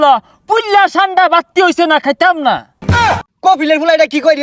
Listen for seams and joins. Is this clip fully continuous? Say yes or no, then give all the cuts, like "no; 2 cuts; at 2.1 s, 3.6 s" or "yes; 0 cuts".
no; 1 cut; at 2.9 s